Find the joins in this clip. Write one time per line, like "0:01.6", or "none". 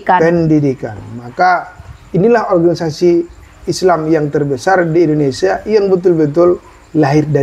none